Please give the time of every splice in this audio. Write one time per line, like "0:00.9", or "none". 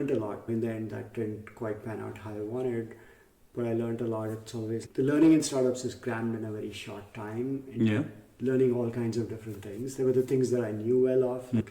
none